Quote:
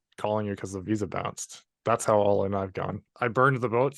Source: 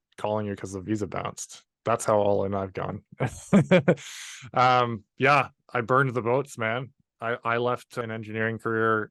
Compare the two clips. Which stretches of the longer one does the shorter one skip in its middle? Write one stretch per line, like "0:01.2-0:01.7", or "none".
0:03.1-0:05.6